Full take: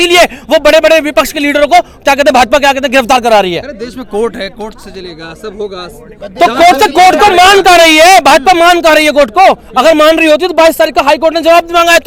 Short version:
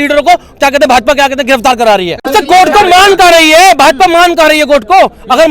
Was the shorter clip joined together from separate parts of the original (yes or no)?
yes